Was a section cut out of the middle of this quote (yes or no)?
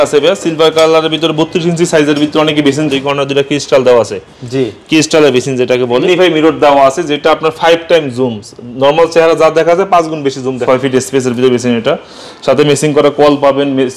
yes